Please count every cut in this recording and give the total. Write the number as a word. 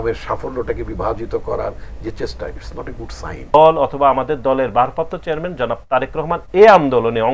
one